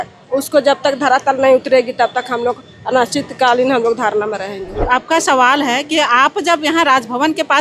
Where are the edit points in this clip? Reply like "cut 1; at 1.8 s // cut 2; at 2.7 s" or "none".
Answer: cut 1; at 4.8 s